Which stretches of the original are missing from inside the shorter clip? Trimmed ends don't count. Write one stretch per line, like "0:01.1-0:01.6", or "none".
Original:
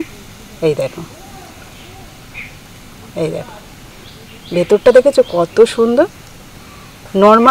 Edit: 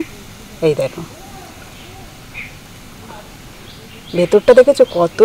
0:03.1-0:03.5